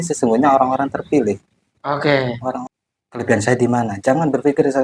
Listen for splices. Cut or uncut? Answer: cut